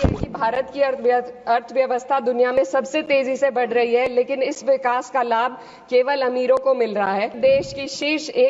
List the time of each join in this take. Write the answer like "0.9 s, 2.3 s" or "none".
7.4 s